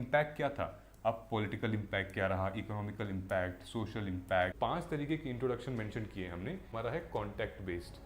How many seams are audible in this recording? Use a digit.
2